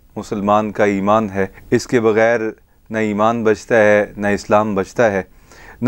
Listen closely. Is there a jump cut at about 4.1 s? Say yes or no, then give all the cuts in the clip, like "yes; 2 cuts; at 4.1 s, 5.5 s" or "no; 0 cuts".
no; 1 cut; at 1.6 s